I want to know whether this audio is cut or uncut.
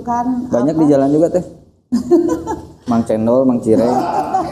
uncut